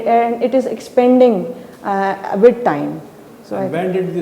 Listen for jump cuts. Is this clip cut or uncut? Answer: uncut